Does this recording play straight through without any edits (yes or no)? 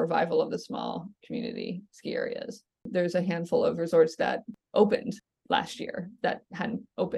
no